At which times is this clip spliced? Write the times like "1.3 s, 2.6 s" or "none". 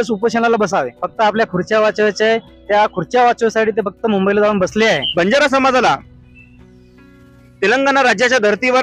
1.0 s, 5.1 s